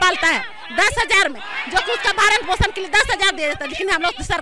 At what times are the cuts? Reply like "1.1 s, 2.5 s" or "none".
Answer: none